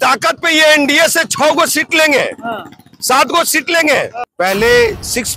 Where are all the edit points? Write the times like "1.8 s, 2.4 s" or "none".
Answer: 4.2 s